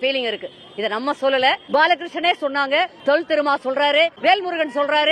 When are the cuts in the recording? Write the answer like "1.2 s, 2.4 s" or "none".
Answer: 1.6 s, 2.9 s, 4.2 s